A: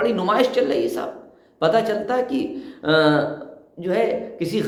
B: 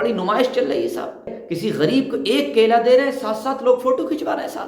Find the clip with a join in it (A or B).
B